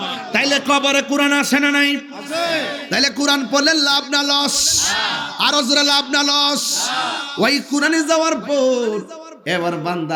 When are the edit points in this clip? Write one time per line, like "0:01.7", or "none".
none